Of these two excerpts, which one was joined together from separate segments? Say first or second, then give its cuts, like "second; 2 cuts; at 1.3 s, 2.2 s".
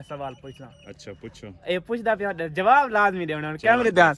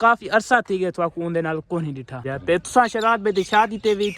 second; 1 cut; at 2.2 s